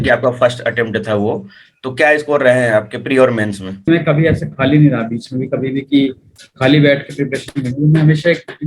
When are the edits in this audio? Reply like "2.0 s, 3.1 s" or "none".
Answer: 3.9 s

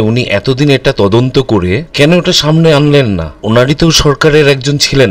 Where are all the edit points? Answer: 1.8 s, 3.3 s

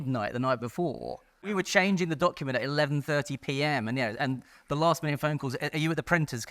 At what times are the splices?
1.5 s

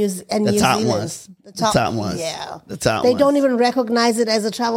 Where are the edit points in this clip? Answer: none

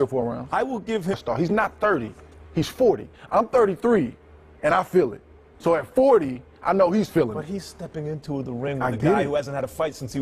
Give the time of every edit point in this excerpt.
none

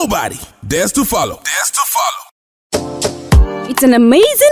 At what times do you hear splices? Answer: 2.2 s

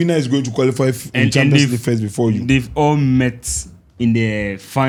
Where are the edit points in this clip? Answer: none

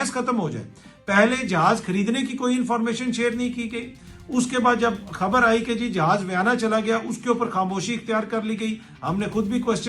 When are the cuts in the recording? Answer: none

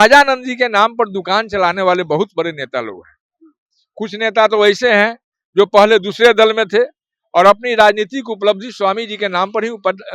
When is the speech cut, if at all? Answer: none

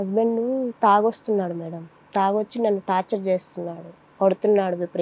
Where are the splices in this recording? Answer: none

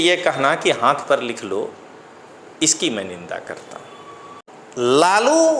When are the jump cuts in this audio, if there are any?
4.4 s

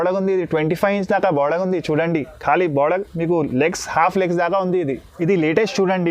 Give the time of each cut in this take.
5.1 s

